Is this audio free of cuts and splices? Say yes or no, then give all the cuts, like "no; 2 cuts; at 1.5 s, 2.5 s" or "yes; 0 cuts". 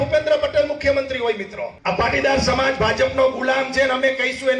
no; 1 cut; at 1.6 s